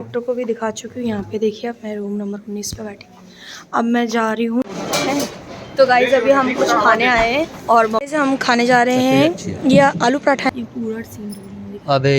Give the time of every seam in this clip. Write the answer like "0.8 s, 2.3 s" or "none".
4.6 s, 8.0 s, 10.5 s